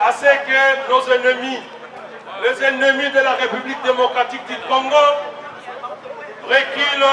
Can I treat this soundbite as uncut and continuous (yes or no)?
yes